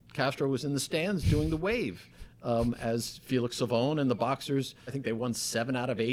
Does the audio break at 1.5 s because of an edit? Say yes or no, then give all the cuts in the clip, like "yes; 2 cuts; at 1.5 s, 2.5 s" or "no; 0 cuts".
no; 1 cut; at 5.0 s